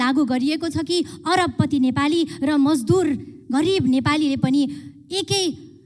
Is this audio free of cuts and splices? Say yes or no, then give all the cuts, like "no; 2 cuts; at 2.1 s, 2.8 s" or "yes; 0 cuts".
yes; 0 cuts